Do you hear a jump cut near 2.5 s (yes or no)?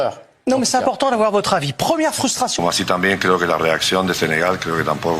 yes